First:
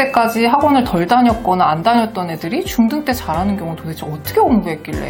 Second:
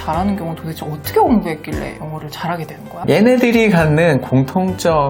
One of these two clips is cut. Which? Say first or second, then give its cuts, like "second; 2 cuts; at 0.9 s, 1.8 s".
second; 1 cut; at 3.0 s